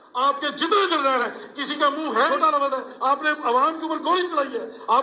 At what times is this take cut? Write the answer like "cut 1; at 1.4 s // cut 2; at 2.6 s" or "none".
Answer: cut 1; at 2.3 s